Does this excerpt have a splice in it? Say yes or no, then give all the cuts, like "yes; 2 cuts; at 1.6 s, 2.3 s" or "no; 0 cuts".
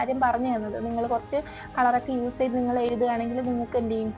no; 0 cuts